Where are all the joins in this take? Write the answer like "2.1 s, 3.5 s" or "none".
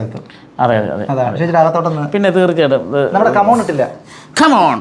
none